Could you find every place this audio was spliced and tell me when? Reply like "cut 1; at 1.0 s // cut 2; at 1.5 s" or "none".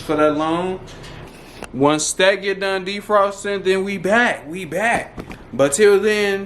cut 1; at 1.2 s